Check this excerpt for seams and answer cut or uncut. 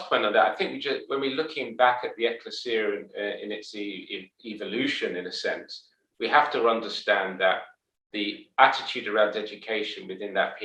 uncut